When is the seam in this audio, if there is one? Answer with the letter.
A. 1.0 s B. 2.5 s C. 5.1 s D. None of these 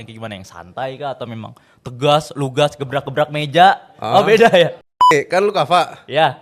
C